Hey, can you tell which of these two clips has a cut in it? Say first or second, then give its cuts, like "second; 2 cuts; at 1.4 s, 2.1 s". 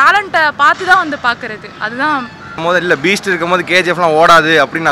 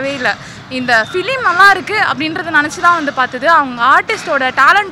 first; 1 cut; at 2.6 s